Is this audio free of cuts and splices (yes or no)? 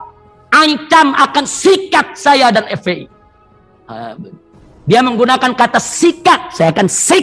yes